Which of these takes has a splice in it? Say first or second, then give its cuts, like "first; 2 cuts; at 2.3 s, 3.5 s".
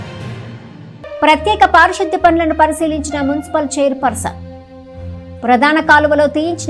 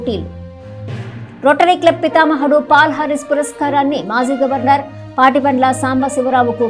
first; 1 cut; at 0.9 s